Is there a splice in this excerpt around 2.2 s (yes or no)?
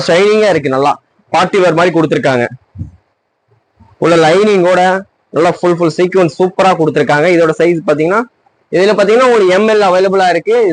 no